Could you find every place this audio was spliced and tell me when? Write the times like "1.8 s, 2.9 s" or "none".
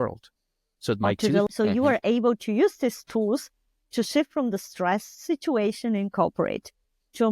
1.5 s